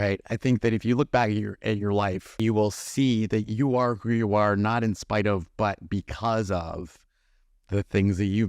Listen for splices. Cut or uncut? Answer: cut